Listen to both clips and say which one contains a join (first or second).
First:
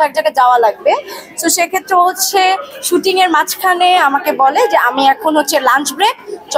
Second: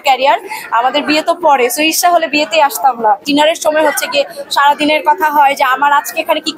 second